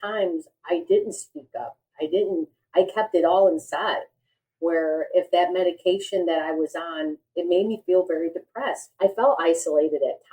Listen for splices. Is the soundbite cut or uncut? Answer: cut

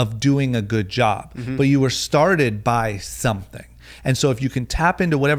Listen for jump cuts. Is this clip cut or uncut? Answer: uncut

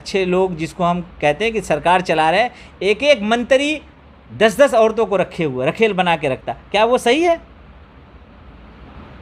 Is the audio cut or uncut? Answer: uncut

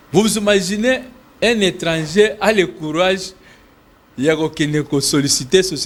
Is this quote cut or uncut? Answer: uncut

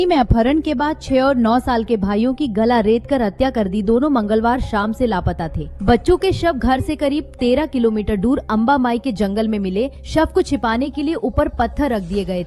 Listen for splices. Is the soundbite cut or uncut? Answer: uncut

